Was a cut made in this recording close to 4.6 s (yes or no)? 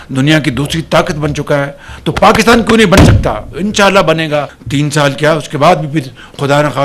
yes